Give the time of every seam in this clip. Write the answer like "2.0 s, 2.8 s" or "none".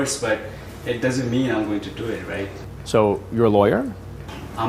2.7 s

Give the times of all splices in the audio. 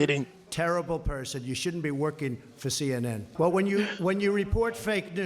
3.3 s

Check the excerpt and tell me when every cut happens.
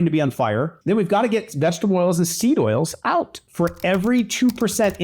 3.4 s

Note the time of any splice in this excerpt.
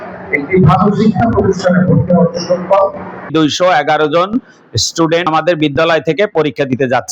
3.3 s

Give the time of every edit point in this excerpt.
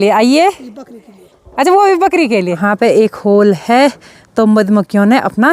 2.6 s

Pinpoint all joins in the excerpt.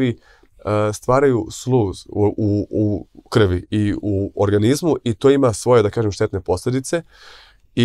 none

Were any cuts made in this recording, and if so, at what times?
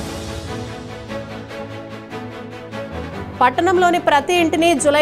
3.1 s

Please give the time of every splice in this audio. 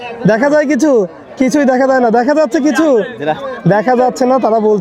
none

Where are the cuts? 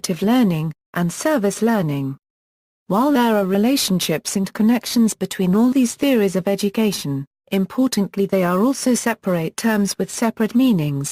4.8 s

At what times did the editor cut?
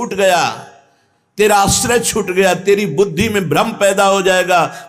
none

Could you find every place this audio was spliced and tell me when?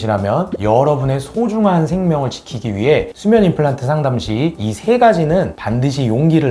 none

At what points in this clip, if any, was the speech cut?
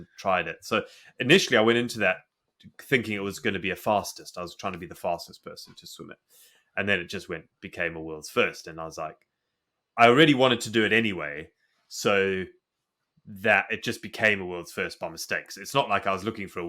none

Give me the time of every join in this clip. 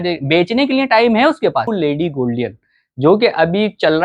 1.7 s

